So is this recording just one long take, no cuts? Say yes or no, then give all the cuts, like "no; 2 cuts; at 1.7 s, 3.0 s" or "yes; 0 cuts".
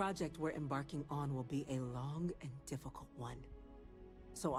yes; 0 cuts